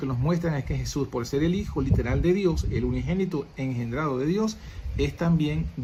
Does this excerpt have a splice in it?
no; 0 cuts

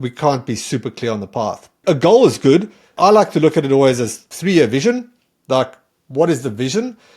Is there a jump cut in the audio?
yes; 3 cuts; at 1.7 s, 2.9 s, 4.3 s

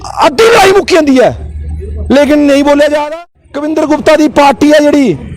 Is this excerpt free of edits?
no; 1 cut; at 3.0 s

